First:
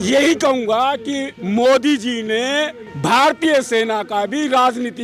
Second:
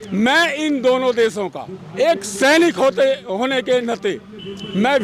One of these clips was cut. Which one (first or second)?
first